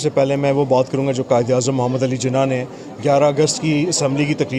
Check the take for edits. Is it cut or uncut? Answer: uncut